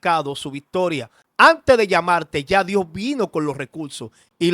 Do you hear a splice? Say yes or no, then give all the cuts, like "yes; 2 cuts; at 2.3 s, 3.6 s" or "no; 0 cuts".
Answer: yes; 1 cut; at 1.2 s